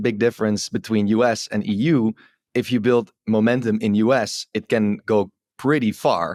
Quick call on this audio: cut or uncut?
uncut